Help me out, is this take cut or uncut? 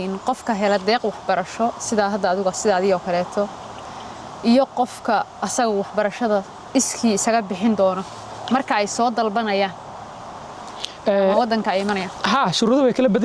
uncut